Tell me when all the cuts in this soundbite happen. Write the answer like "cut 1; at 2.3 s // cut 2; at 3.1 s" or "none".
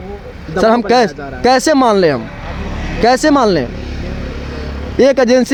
none